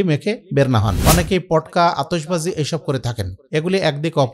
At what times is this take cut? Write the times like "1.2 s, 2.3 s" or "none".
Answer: 0.9 s